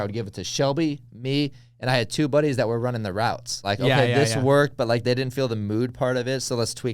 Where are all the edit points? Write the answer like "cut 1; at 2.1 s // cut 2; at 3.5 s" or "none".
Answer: cut 1; at 3.6 s